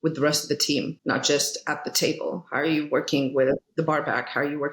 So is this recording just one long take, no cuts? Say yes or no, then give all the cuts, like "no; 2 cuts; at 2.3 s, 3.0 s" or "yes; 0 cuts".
no; 1 cut; at 0.9 s